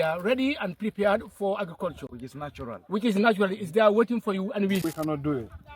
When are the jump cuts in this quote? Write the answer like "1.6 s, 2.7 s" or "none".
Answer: 4.8 s

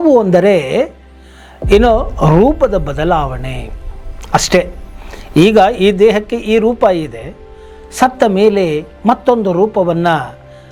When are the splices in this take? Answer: none

